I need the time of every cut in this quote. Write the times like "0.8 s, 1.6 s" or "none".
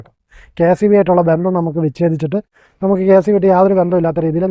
none